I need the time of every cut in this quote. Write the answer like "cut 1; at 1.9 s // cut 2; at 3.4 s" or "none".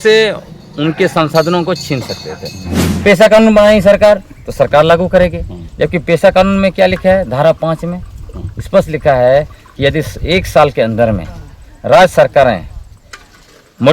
cut 1; at 2.8 s